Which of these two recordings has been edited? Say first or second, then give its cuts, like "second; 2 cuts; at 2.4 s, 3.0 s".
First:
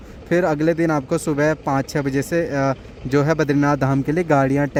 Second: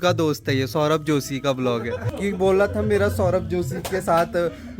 second; 1 cut; at 2.1 s